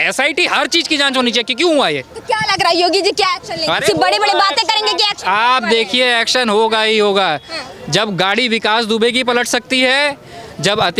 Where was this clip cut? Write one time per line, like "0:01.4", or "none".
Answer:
none